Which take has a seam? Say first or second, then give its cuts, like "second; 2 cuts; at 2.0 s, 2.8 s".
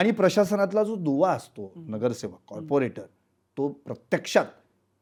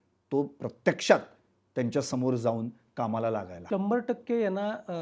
second; 1 cut; at 3.6 s